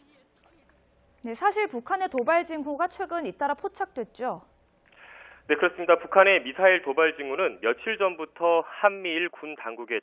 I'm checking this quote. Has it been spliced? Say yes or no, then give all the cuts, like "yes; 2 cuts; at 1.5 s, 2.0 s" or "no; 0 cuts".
yes; 1 cut; at 5.1 s